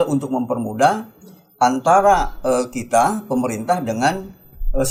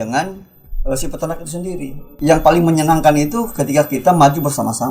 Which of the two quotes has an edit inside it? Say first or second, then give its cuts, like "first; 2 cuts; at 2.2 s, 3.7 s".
second; 1 cut; at 2.1 s